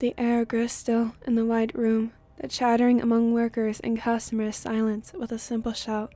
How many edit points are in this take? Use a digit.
0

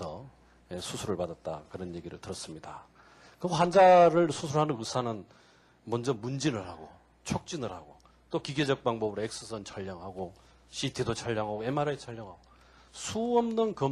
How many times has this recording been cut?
0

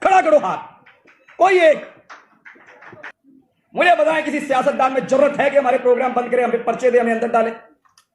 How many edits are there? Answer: 1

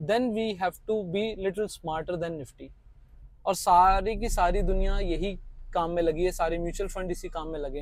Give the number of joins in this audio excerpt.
0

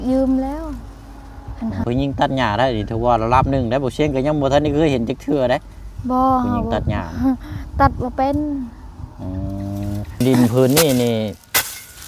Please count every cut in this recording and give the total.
2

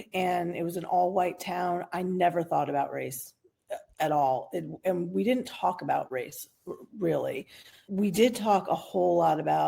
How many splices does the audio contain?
1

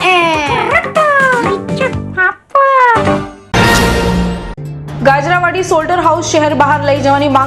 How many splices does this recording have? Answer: 1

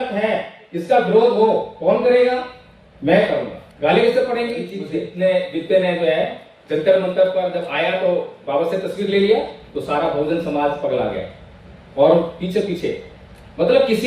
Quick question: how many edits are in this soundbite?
1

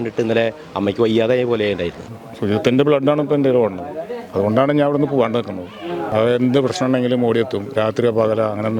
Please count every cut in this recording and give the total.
2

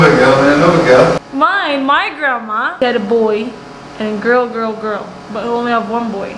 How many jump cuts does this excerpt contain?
1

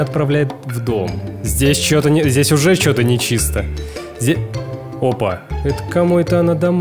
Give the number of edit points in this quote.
2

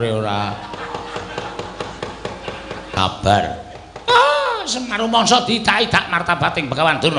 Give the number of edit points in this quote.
1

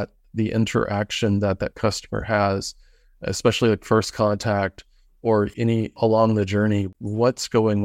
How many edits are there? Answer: 2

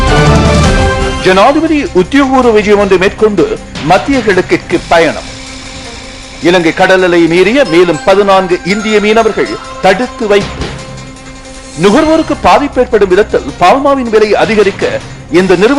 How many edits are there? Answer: 1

